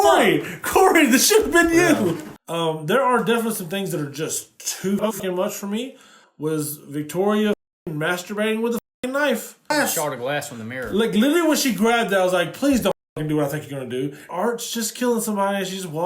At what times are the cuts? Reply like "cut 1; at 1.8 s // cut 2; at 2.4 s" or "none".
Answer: cut 1; at 2.3 s

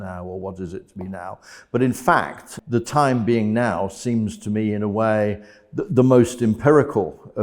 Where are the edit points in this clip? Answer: cut 1; at 2.5 s

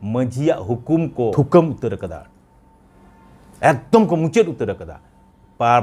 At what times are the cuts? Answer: cut 1; at 1.3 s

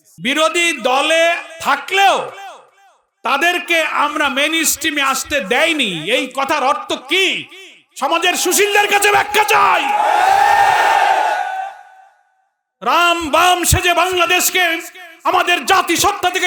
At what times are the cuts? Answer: none

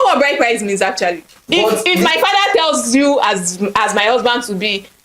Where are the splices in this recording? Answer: cut 1; at 1.3 s

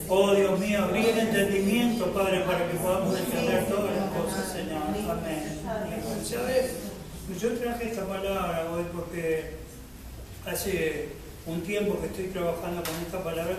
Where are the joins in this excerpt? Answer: none

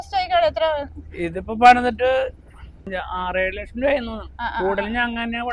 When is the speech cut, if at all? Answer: cut 1; at 2.9 s

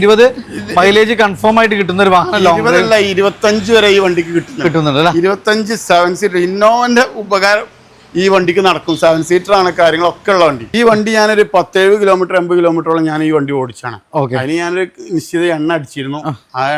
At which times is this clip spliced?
cut 1; at 10.6 s

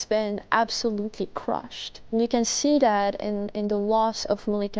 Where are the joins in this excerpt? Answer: cut 1; at 2.1 s

